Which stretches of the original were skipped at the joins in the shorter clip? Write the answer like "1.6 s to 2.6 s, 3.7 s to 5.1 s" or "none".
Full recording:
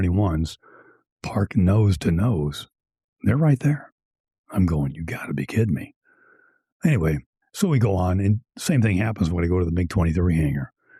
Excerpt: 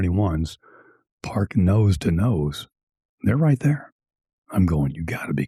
none